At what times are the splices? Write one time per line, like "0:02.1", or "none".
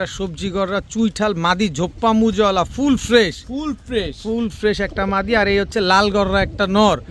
none